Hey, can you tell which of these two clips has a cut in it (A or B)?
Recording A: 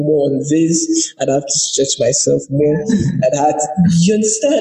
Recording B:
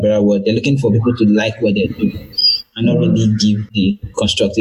B